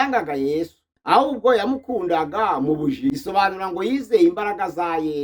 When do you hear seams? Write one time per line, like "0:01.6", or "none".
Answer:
0:03.1